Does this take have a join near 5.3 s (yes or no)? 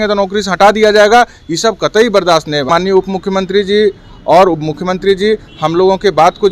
no